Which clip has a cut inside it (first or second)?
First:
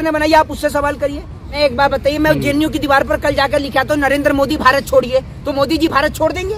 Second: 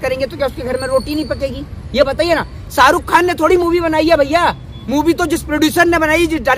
first